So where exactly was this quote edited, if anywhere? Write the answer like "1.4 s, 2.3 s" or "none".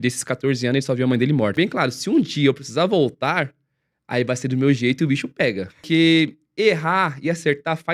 1.6 s, 5.8 s